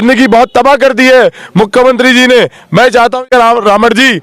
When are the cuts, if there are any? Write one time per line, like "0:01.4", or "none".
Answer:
0:03.3